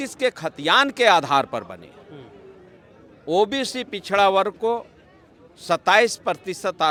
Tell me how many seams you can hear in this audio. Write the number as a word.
zero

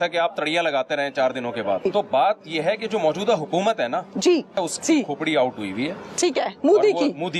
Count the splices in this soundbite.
two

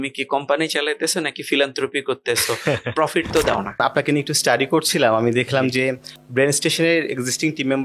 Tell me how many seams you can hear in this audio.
one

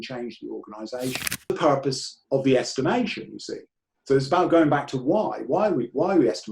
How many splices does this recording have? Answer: one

